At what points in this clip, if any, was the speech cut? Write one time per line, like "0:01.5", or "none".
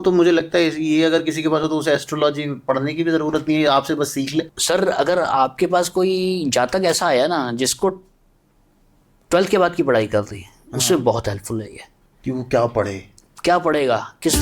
0:04.5